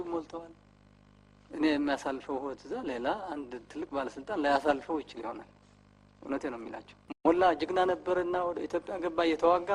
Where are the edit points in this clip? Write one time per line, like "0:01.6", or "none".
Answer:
0:07.3